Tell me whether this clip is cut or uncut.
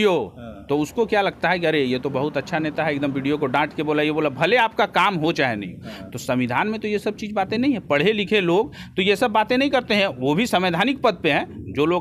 uncut